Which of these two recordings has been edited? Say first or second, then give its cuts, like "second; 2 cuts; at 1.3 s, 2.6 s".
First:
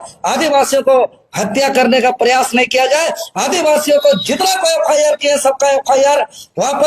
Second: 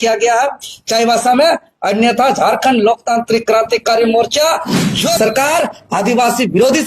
second; 1 cut; at 5.2 s